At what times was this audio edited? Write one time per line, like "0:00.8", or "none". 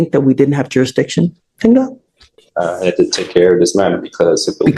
none